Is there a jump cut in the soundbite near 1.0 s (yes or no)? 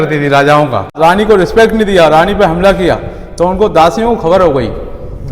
yes